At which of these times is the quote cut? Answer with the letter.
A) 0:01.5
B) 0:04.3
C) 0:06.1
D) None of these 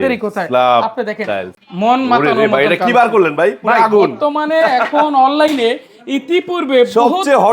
A